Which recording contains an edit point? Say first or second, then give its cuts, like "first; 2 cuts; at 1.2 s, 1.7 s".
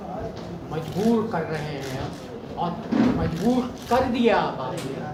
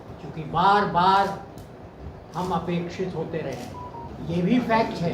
second; 1 cut; at 4.1 s